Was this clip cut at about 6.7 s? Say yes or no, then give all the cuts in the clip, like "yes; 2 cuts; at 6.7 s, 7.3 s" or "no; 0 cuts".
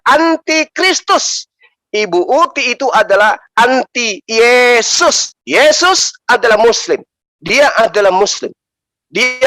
no; 1 cut; at 5.3 s